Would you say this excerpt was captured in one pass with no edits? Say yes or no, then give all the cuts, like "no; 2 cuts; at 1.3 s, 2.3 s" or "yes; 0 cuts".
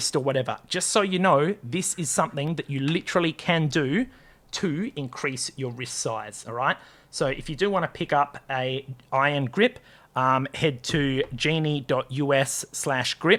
yes; 0 cuts